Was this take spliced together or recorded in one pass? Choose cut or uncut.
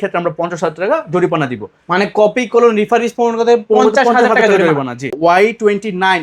cut